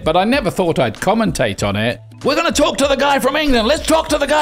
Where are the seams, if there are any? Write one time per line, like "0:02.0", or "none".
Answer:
0:02.1